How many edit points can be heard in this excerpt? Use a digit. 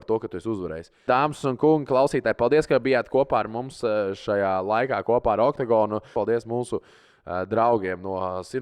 2